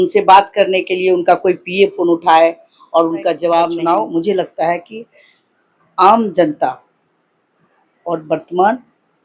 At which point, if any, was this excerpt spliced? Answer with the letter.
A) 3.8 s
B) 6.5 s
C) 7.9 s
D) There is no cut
A